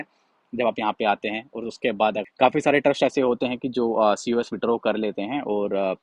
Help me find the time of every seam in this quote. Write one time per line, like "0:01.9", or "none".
0:02.3